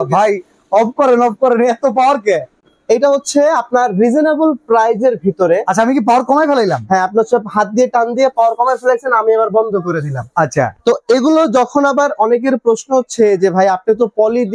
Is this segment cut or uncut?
uncut